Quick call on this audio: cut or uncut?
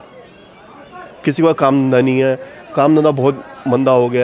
uncut